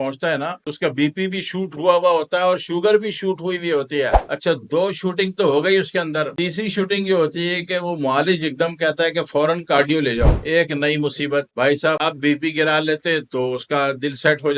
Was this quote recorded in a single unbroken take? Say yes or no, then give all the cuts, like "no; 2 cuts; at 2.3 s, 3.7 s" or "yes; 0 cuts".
yes; 0 cuts